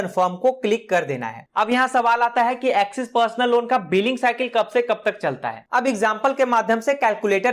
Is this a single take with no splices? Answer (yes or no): no